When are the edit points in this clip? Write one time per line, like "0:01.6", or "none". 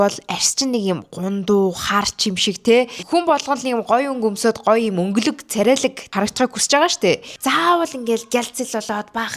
0:03.0
0:06.0
0:07.3